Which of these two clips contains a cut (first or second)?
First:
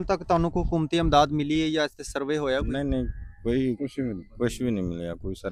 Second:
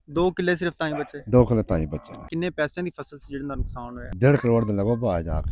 second